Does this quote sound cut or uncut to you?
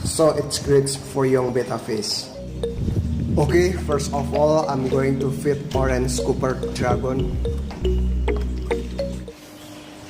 cut